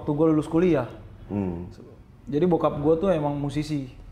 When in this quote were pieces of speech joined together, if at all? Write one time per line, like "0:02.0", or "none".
none